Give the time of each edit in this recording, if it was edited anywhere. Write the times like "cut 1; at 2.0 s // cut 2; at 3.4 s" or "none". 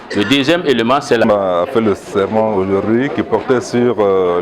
cut 1; at 1.2 s